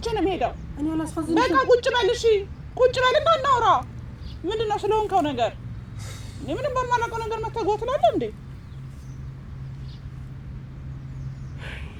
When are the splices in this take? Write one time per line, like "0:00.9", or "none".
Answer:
none